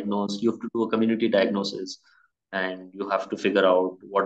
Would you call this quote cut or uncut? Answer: uncut